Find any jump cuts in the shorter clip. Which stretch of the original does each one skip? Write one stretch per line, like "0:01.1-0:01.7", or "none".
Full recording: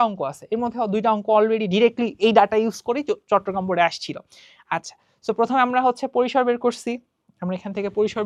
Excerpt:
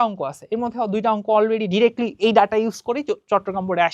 none